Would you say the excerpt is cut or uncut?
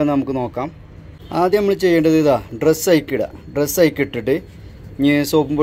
cut